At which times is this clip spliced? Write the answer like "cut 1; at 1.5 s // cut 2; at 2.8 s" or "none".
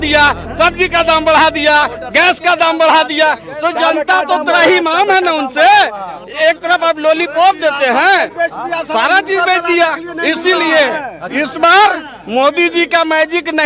none